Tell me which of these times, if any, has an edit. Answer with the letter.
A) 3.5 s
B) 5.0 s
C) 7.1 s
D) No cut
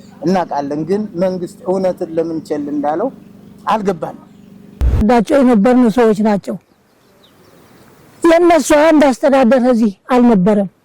B